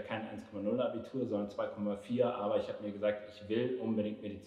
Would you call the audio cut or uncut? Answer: uncut